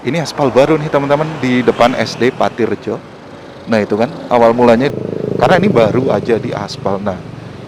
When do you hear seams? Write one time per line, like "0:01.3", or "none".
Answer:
0:04.9